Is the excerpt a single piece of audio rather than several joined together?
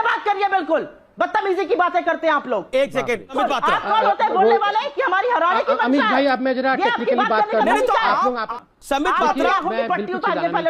no; 2 cuts; at 3.4 s, 8.6 s

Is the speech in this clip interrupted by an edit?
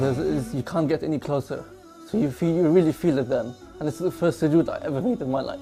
no; 0 cuts

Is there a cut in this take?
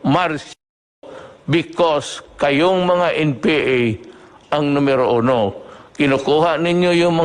no; 0 cuts

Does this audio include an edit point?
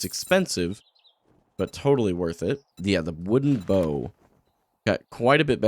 yes; 1 cut; at 2.7 s

